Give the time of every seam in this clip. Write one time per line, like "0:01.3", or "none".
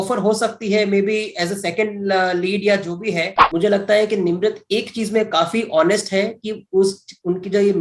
0:03.3